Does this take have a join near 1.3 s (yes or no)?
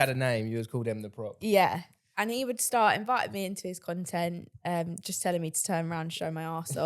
no